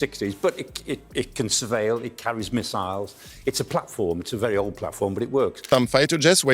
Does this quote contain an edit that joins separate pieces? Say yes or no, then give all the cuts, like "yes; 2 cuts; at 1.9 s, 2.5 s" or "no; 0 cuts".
yes; 1 cut; at 5.6 s